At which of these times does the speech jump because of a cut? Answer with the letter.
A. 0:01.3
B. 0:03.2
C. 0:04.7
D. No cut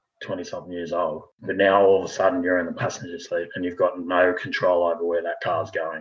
A